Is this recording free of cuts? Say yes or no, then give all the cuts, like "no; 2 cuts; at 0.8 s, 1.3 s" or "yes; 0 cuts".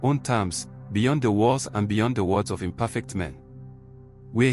yes; 0 cuts